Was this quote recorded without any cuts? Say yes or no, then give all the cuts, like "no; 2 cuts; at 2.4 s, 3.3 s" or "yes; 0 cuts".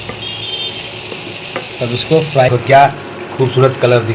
no; 1 cut; at 2.5 s